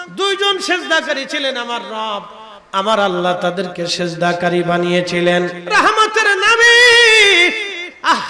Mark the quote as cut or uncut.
cut